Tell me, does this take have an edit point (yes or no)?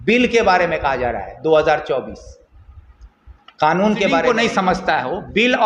yes